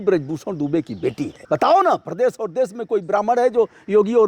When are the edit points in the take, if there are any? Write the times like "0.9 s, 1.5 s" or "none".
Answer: 1.3 s